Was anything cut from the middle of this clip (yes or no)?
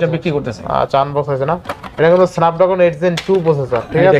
no